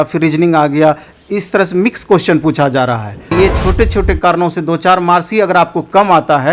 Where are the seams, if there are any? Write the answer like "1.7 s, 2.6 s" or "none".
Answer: 3.3 s